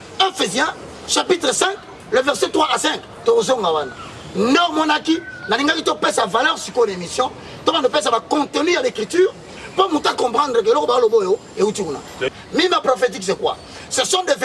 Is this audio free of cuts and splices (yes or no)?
no